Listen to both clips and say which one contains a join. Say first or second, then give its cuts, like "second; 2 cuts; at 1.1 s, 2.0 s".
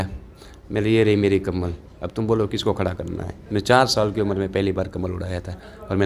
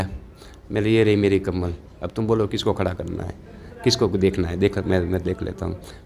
first; 1 cut; at 3.3 s